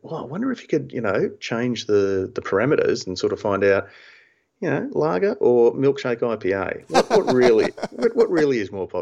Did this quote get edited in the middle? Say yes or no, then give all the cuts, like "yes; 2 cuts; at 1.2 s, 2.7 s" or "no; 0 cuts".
no; 0 cuts